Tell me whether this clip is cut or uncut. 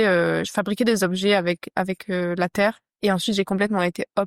cut